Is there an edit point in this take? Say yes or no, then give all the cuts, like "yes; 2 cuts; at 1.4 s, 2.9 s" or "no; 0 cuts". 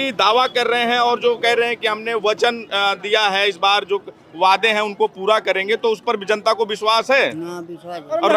no; 0 cuts